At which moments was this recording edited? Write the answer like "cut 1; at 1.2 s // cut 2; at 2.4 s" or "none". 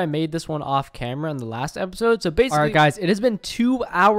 cut 1; at 2.5 s